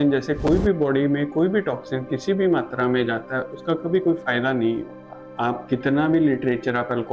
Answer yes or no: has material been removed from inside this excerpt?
no